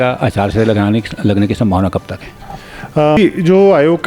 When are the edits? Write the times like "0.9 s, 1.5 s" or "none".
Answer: 3.2 s